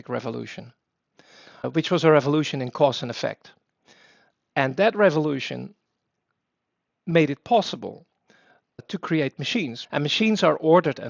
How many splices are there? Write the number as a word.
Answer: one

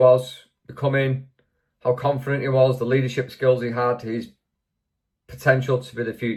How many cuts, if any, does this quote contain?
zero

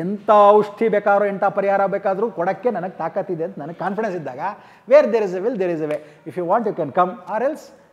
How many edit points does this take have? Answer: zero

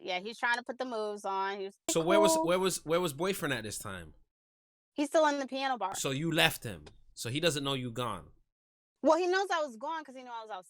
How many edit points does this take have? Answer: two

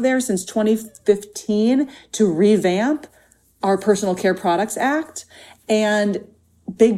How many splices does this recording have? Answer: zero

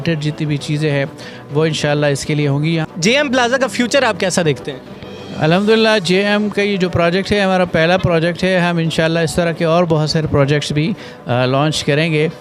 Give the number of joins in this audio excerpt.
one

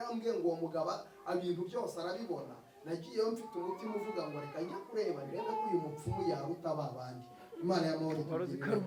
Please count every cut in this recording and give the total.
zero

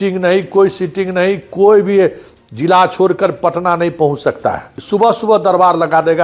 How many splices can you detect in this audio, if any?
one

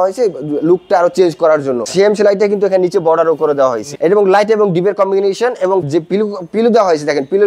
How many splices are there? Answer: two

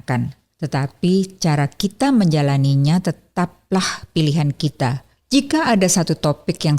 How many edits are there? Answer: one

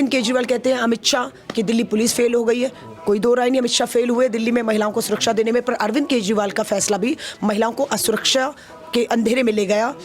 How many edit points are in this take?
zero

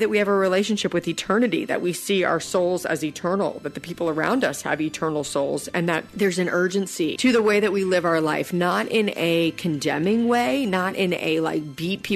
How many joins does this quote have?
two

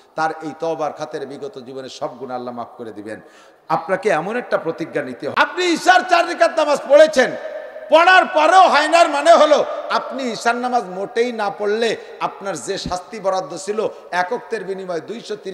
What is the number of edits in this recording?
one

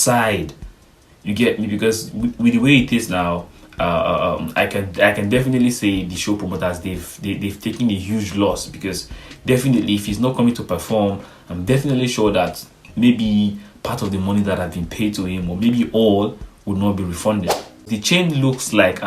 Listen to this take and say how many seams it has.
one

